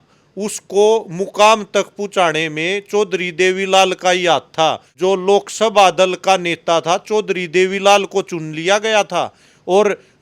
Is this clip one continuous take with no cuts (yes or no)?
no